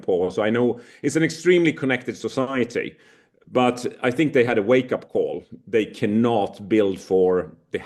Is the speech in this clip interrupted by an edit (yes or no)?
no